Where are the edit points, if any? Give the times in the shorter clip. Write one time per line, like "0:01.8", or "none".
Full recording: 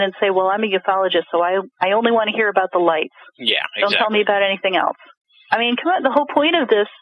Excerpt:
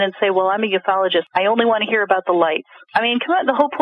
0:01.3
0:02.7